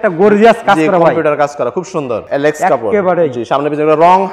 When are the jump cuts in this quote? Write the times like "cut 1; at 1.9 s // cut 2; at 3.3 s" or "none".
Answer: cut 1; at 2.2 s